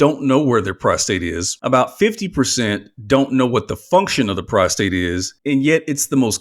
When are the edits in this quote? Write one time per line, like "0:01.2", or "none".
0:01.5
0:05.3